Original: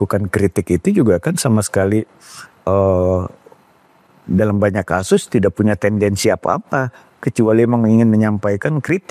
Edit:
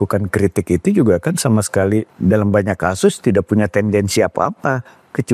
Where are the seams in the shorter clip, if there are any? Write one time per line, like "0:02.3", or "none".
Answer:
0:02.1